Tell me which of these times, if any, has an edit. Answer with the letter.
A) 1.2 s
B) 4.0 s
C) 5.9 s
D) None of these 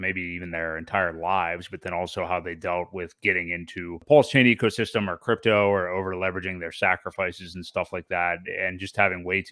B